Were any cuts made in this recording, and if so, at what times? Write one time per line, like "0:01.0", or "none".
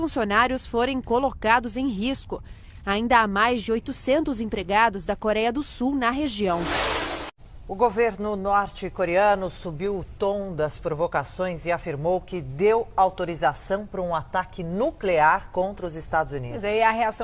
0:02.8